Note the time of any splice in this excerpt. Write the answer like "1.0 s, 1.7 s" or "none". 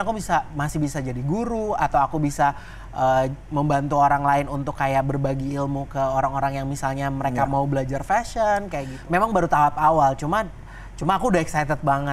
8.9 s